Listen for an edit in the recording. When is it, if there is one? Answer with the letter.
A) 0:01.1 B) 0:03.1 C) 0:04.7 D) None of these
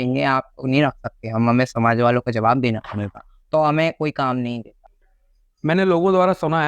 C